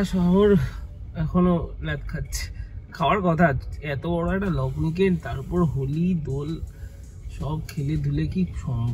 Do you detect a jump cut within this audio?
no; 0 cuts

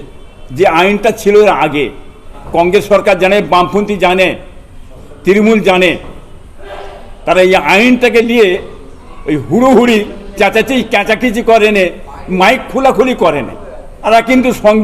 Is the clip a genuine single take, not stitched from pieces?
no; 2 cuts; at 2.3 s, 14.1 s

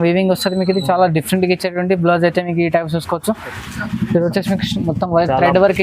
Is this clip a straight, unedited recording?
no; 1 cut; at 3.6 s

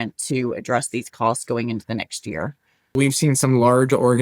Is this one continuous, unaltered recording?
no; 1 cut; at 2.9 s

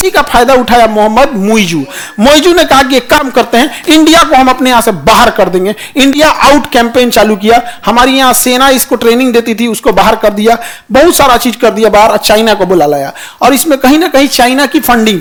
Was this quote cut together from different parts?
no; 0 cuts

